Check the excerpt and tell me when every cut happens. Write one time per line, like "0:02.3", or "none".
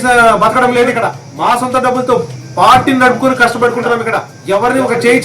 0:01.2
0:04.3